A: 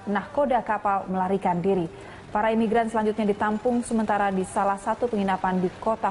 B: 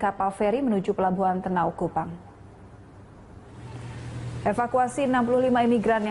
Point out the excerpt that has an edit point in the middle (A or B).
A